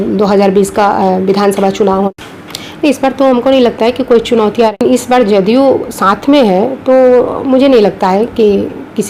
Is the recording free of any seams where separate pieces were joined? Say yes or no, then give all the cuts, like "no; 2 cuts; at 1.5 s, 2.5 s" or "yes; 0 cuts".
no; 2 cuts; at 2.1 s, 4.7 s